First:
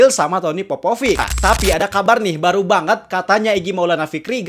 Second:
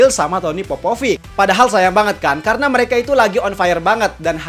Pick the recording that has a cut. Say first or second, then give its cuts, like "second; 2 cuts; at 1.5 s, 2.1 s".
first; 1 cut; at 1.3 s